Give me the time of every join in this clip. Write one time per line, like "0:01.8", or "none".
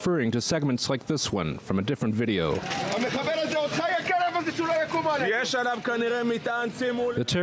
0:03.5